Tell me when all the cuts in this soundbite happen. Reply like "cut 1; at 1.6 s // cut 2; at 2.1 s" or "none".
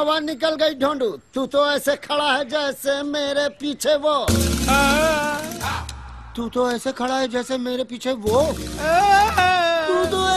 none